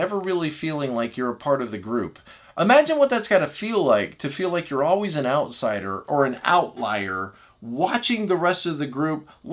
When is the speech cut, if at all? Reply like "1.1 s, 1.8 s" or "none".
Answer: 2.2 s